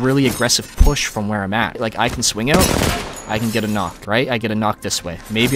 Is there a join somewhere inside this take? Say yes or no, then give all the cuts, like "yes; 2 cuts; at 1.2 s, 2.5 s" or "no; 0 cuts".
yes; 2 cuts; at 1.8 s, 4.0 s